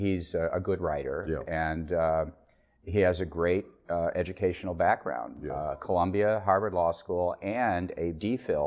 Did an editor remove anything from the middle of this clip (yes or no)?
yes